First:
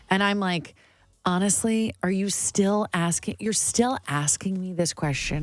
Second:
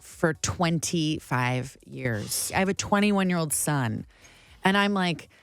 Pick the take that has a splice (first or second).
second